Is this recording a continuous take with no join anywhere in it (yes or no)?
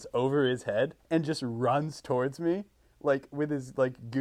no